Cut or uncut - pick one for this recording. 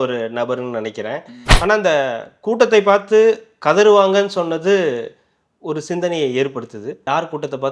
cut